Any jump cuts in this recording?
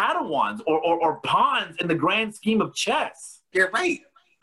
yes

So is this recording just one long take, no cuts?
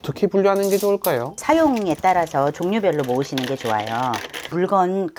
yes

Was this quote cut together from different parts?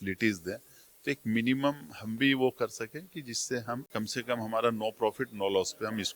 yes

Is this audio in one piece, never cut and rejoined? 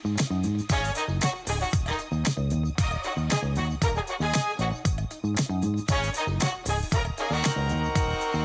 yes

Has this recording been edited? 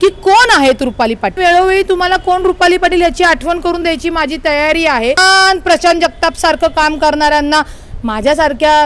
yes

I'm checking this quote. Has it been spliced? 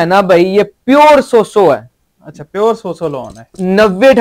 no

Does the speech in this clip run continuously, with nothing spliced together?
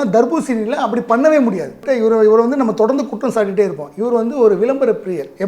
no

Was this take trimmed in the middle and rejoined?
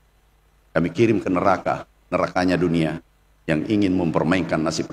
no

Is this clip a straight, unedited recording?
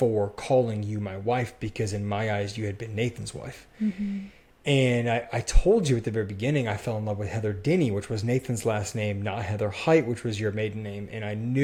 yes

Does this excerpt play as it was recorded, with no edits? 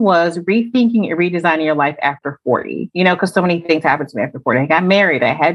no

